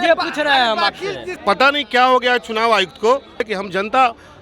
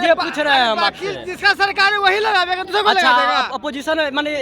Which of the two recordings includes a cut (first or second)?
first